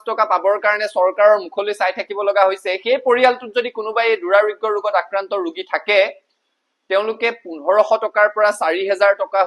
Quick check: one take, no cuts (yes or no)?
yes